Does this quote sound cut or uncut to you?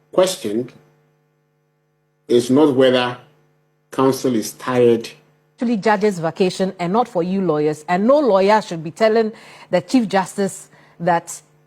cut